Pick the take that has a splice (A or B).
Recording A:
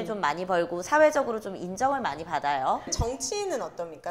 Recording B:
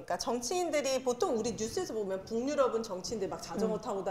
A